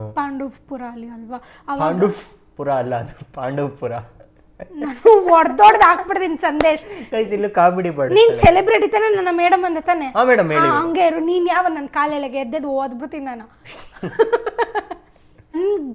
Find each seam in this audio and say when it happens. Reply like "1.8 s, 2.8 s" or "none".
none